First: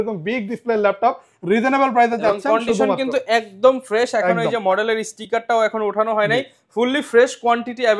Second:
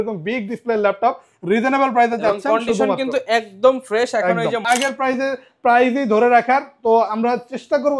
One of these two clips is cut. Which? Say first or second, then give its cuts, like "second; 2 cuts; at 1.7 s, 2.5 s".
second; 1 cut; at 4.6 s